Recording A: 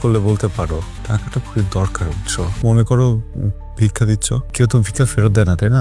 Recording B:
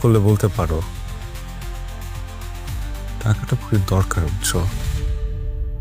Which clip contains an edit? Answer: A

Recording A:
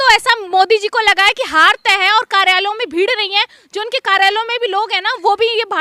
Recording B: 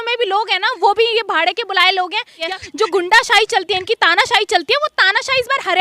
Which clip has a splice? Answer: B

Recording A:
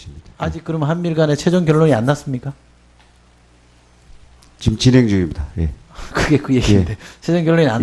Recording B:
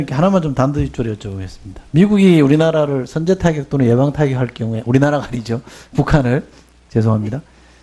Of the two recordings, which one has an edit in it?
B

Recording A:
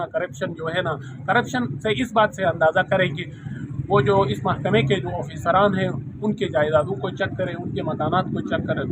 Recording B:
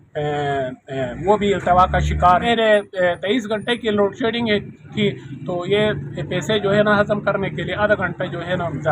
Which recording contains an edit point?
B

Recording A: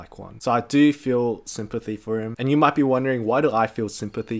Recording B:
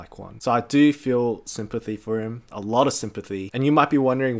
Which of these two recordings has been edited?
A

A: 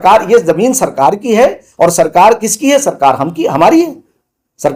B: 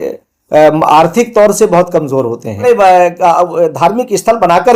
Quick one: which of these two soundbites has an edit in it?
B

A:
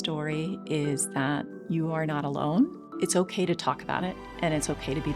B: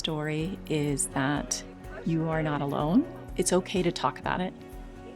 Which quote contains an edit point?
A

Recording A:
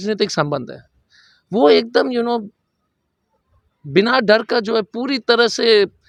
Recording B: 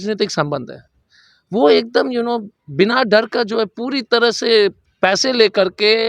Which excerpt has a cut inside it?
B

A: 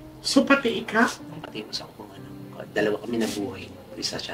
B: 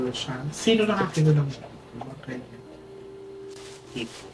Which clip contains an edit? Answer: A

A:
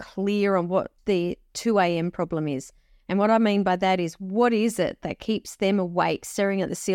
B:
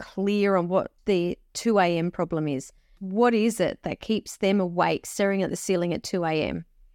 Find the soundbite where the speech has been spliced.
B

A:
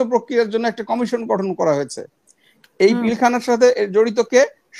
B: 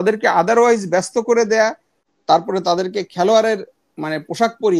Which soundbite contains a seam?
B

